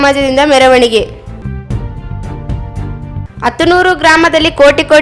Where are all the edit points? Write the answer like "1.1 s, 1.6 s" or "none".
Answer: 1.2 s, 3.1 s